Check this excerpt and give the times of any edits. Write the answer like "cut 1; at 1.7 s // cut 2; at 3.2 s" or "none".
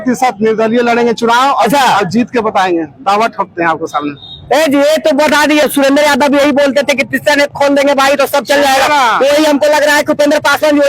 cut 1; at 5.7 s